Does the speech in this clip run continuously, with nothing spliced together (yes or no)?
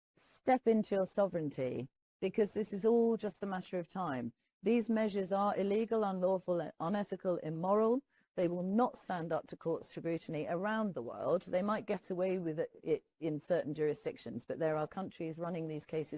yes